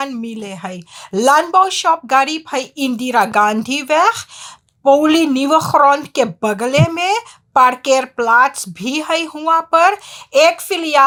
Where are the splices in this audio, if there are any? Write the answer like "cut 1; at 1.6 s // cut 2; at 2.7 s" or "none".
none